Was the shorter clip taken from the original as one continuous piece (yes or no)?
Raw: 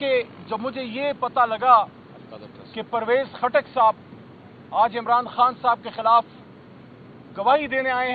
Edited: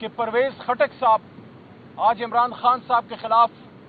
yes